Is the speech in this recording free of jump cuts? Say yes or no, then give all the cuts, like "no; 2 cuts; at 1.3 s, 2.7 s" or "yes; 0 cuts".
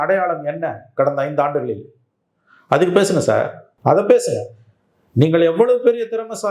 no; 1 cut; at 3.6 s